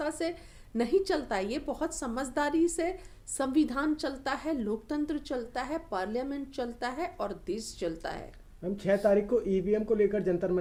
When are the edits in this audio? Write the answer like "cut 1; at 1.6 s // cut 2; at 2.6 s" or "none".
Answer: none